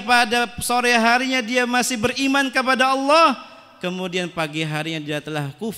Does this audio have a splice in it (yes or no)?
no